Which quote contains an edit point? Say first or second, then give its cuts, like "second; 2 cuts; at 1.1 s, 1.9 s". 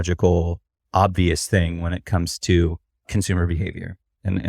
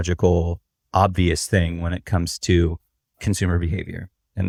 first; 1 cut; at 2.9 s